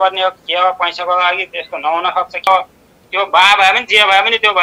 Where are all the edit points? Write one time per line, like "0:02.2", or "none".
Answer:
0:02.5